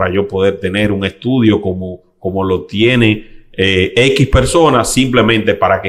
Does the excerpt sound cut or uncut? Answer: uncut